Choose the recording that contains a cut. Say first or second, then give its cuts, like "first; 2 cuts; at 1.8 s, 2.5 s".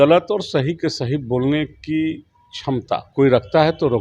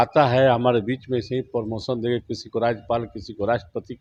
first; 1 cut; at 3.1 s